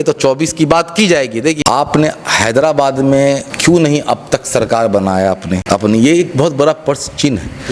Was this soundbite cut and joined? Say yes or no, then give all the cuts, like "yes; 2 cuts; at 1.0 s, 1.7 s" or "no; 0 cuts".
yes; 3 cuts; at 1.6 s, 3.5 s, 5.5 s